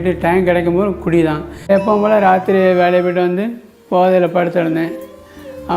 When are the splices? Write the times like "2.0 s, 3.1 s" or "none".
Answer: 1.5 s